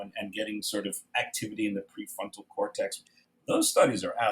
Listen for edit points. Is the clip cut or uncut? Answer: cut